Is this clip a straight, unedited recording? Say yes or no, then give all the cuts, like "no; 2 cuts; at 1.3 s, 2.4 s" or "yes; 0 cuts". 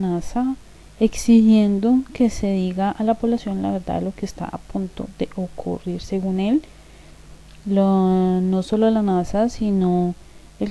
no; 1 cut; at 5.4 s